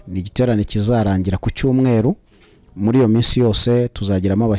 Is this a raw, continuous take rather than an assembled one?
yes; 0 cuts

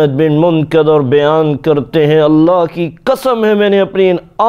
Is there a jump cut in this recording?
no; 0 cuts

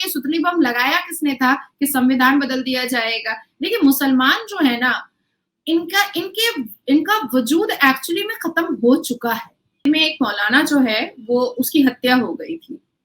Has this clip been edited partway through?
yes; 1 cut; at 9.8 s

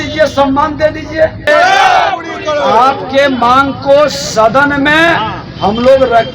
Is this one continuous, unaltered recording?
no; 1 cut; at 1.5 s

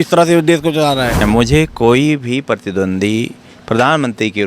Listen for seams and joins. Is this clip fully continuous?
no; 1 cut; at 1.2 s

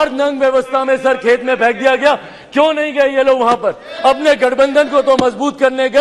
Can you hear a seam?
no; 0 cuts

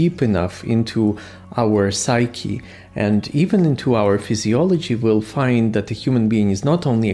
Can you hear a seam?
no; 0 cuts

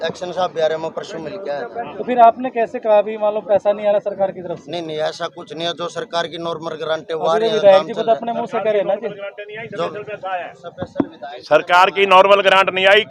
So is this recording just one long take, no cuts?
yes; 0 cuts

